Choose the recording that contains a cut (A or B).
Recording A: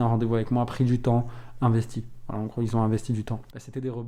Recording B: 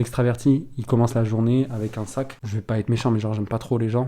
B